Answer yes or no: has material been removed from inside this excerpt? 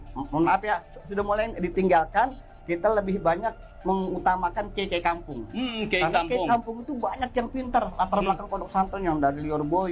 no